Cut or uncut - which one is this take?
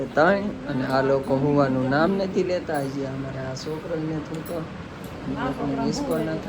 uncut